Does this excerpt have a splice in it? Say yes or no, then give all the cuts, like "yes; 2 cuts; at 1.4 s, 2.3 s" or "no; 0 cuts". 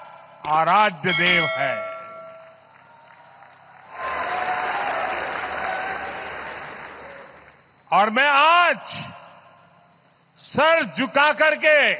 no; 0 cuts